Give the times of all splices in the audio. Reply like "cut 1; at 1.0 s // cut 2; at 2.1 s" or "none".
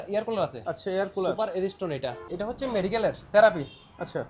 cut 1; at 2.2 s